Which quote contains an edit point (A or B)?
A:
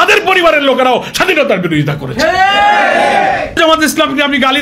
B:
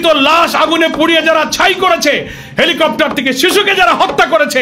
A